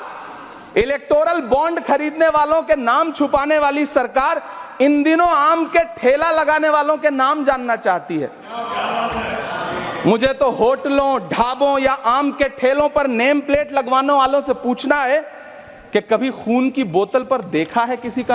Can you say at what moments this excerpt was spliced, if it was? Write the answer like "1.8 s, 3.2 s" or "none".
none